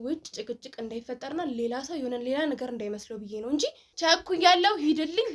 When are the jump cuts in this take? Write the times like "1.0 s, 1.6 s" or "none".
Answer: 3.8 s